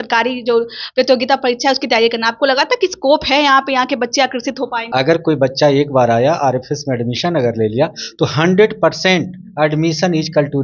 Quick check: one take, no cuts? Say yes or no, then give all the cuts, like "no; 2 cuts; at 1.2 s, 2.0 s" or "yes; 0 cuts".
no; 1 cut; at 4.8 s